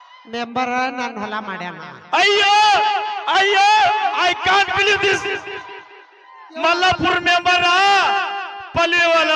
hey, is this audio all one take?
yes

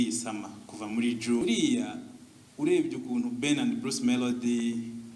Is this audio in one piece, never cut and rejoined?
no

